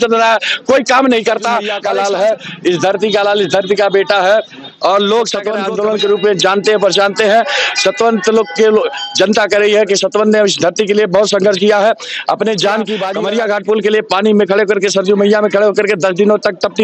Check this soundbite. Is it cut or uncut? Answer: cut